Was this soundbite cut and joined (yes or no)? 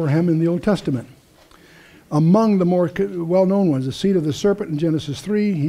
yes